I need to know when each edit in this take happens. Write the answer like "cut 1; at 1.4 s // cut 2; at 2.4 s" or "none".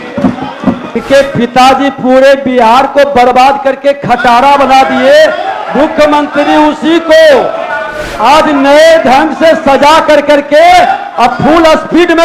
cut 1; at 0.9 s